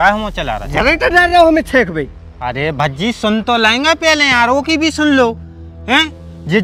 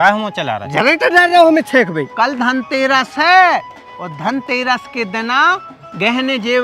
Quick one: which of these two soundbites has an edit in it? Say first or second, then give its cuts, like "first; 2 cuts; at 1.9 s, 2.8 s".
second; 1 cut; at 2.0 s